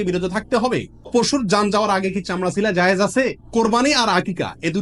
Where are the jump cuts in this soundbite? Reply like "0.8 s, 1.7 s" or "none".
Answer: 1.0 s, 3.4 s